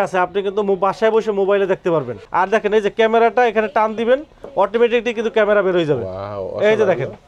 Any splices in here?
yes; 1 cut; at 2.2 s

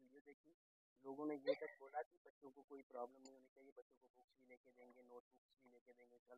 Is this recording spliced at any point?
no; 0 cuts

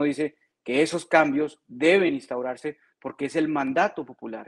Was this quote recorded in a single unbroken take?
yes; 0 cuts

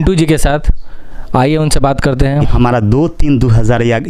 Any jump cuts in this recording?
yes; 1 cut; at 2.5 s

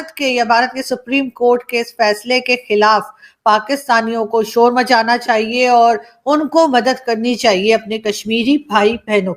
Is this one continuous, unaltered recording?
yes; 0 cuts

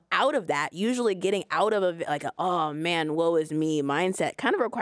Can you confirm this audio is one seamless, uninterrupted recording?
yes; 0 cuts

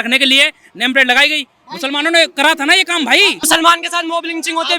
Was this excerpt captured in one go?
no; 1 cut; at 3.5 s

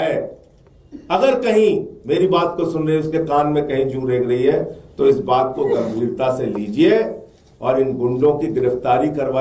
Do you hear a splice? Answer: no; 0 cuts

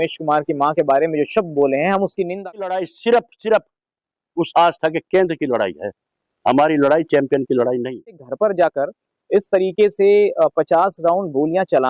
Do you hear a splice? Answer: yes; 2 cuts; at 2.8 s, 8.3 s

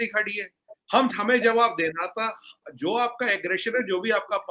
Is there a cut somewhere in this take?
no; 0 cuts

